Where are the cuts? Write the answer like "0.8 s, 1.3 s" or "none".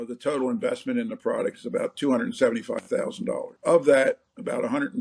3.5 s